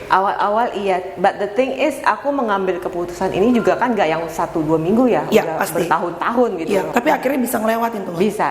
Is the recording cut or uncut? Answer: cut